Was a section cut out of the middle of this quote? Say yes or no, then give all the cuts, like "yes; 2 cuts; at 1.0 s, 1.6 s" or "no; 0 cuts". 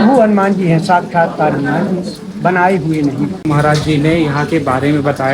yes; 1 cut; at 3.4 s